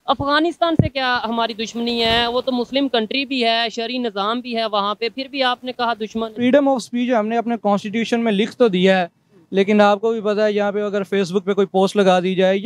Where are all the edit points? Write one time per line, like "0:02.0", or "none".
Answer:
0:06.4